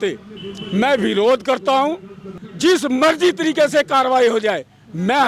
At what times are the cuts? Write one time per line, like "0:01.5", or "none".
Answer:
0:02.4